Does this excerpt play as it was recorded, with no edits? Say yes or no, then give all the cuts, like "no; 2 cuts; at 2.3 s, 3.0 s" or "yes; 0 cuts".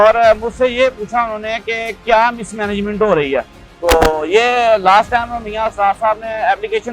no; 1 cut; at 3.5 s